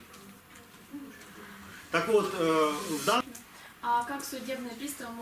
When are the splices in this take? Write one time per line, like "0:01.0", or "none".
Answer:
0:03.2